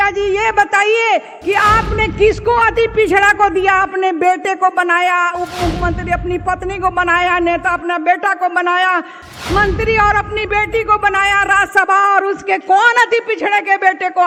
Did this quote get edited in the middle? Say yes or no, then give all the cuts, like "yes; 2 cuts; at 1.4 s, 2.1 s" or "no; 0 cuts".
no; 0 cuts